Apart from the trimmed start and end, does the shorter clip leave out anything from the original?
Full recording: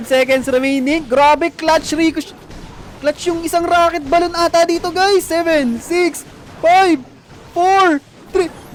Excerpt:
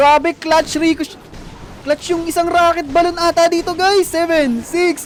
no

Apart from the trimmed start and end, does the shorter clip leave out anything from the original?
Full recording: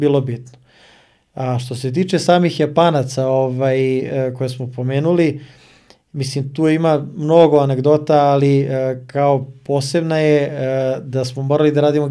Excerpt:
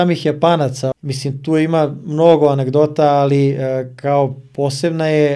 yes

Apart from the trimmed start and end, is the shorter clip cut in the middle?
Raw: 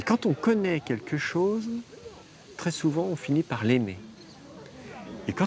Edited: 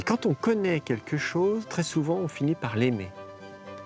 yes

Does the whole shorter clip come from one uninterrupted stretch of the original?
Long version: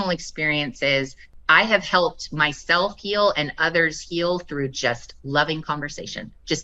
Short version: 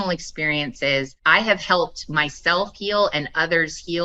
no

